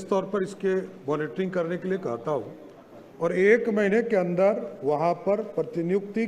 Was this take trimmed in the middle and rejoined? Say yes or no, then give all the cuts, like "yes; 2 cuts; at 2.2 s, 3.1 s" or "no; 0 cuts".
no; 0 cuts